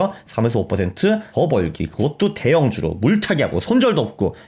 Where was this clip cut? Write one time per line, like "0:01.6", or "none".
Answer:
0:01.3